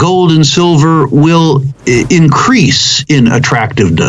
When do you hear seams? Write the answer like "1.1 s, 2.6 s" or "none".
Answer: 1.7 s

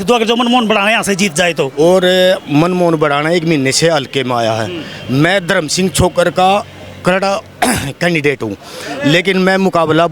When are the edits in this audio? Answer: 1.7 s

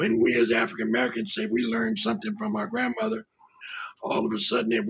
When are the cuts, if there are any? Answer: none

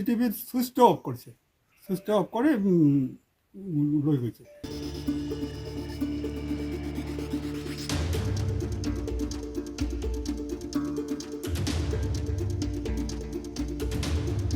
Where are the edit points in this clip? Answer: 4.5 s

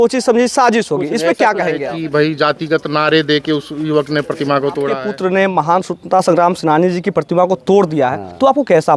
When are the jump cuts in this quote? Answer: 1.8 s, 5.0 s

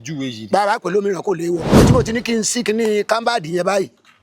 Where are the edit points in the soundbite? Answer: 1.8 s

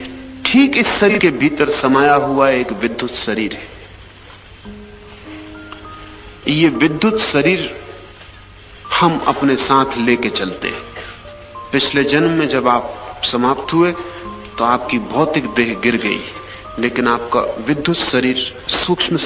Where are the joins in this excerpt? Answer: 1.1 s

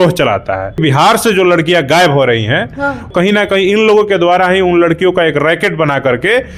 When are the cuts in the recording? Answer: 0.8 s, 3.1 s

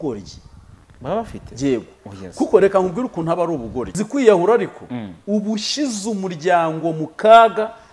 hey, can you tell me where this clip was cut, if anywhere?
4.0 s

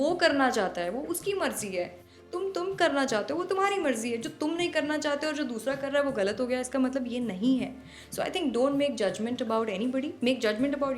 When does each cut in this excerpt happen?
none

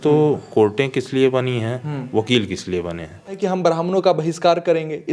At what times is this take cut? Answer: 3.4 s

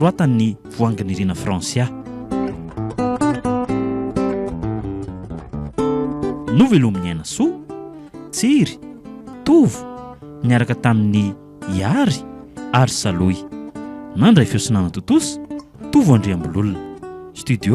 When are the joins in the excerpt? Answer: 2.0 s

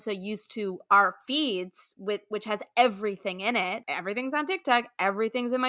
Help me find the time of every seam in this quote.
3.9 s

